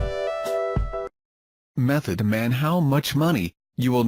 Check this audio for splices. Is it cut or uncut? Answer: uncut